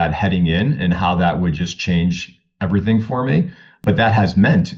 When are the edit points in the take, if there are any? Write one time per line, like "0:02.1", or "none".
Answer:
0:03.8